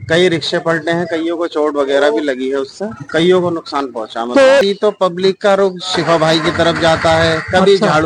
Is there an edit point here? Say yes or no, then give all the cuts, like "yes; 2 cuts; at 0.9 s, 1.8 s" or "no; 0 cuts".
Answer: yes; 1 cut; at 4.6 s